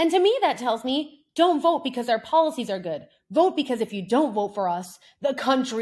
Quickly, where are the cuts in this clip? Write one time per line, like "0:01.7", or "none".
none